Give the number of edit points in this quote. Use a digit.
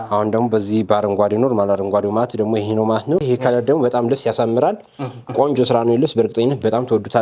1